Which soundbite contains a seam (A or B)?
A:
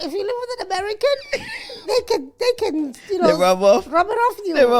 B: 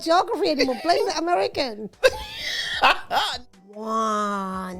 B